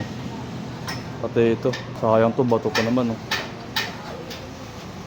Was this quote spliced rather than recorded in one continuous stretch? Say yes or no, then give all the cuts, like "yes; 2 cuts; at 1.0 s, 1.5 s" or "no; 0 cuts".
yes; 1 cut; at 1.9 s